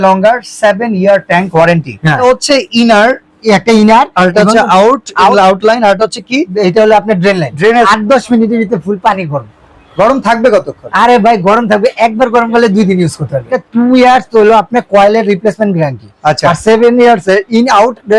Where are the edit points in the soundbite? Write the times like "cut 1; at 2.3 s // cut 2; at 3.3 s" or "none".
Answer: cut 1; at 2.2 s // cut 2; at 7.9 s // cut 3; at 13.6 s